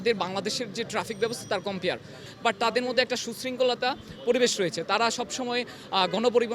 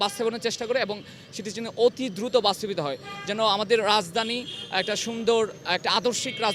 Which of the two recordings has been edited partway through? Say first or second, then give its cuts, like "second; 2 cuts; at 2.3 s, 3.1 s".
first; 1 cut; at 2.3 s